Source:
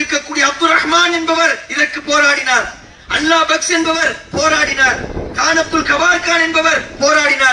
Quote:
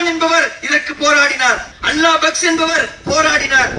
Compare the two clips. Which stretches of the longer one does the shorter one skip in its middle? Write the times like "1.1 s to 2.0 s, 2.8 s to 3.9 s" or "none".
2.8 s to 3.0 s